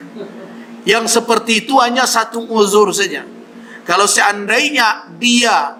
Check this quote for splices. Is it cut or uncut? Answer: uncut